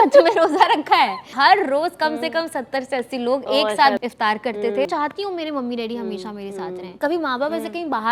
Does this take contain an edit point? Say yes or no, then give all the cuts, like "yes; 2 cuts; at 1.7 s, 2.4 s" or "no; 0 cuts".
yes; 4 cuts; at 1.3 s, 4.0 s, 4.9 s, 7.0 s